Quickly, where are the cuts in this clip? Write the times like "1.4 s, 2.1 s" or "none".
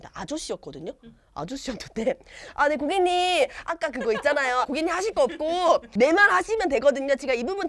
4.7 s